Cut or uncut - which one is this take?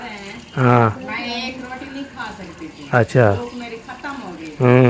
uncut